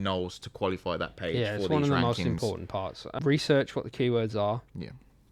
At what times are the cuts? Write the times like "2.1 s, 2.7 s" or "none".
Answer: 3.1 s